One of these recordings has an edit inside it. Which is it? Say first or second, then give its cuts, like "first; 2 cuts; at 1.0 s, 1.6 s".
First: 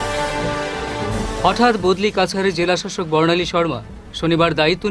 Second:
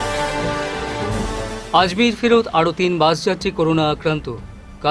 first; 1 cut; at 1.2 s